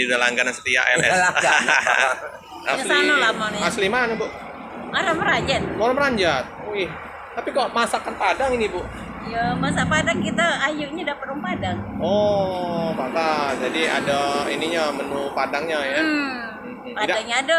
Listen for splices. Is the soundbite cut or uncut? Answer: cut